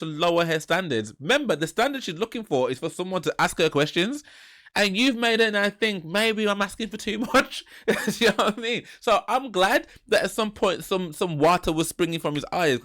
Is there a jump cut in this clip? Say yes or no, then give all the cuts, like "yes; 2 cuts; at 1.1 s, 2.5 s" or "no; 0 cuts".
no; 0 cuts